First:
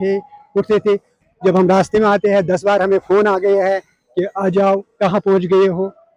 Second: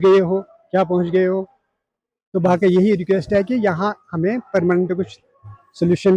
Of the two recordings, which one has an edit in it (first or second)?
first